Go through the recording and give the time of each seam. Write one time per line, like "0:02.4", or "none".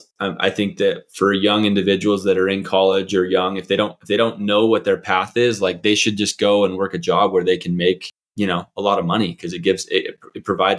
none